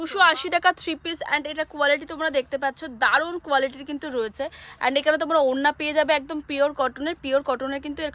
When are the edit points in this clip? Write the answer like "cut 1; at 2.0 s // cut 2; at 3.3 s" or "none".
none